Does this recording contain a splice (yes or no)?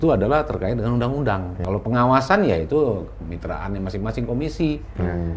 yes